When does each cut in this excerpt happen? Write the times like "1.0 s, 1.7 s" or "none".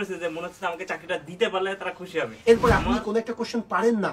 2.4 s